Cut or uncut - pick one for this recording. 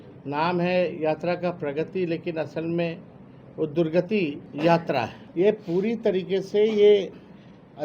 cut